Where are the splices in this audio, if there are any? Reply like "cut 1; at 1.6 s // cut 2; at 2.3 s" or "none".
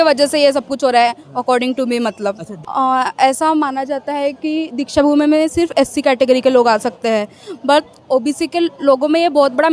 cut 1; at 2.5 s // cut 2; at 8.1 s